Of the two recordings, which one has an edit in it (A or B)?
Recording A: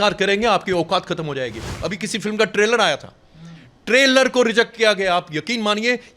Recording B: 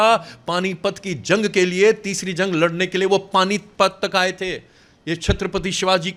A